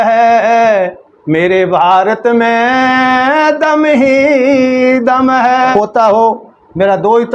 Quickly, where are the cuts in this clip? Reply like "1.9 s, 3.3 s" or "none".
5.6 s